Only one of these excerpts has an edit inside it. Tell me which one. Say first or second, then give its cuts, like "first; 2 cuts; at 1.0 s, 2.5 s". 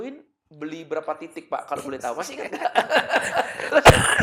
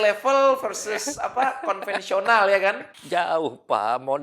second; 1 cut; at 2.9 s